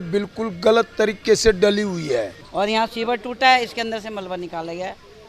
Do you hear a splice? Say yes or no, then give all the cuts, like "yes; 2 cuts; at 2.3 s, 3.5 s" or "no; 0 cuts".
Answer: yes; 1 cut; at 2.4 s